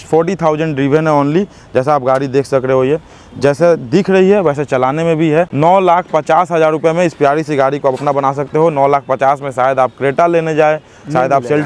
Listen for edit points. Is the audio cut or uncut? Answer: cut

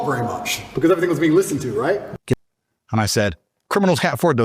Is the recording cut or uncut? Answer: cut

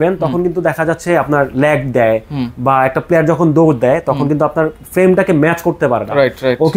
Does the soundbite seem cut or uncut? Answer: uncut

